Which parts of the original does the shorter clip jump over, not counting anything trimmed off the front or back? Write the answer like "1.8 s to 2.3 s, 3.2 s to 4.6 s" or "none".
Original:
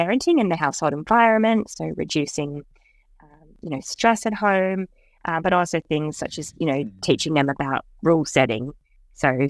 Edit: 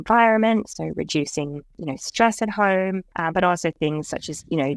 2.7 s to 3.5 s, 4.9 s to 5.2 s